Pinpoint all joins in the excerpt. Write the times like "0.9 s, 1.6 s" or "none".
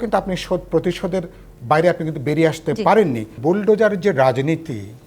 3.4 s